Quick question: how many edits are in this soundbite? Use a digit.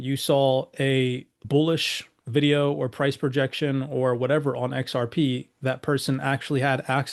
1